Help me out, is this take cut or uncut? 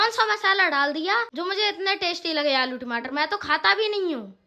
cut